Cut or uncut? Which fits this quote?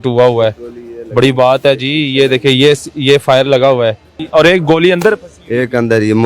cut